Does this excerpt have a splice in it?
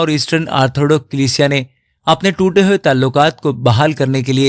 no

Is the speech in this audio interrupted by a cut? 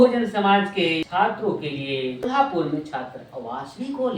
yes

